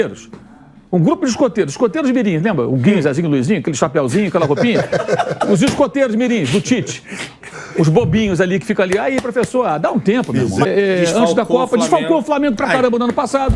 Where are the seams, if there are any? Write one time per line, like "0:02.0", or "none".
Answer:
0:10.7